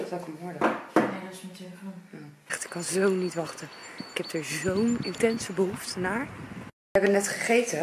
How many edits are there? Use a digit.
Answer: 2